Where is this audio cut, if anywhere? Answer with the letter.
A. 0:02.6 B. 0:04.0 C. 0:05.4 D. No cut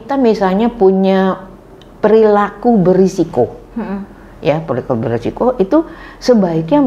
D